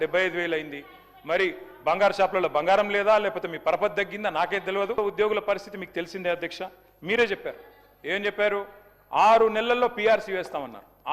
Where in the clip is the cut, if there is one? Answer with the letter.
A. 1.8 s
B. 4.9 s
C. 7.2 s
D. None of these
B